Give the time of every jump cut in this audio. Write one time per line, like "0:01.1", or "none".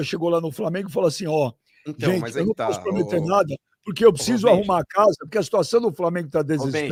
none